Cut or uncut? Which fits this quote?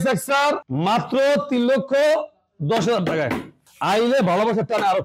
uncut